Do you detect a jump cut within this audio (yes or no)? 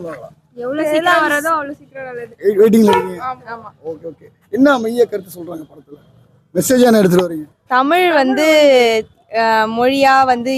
no